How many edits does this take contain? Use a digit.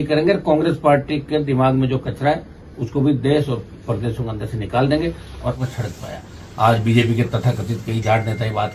1